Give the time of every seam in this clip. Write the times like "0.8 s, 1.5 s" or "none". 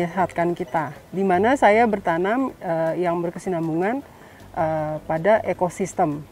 1.0 s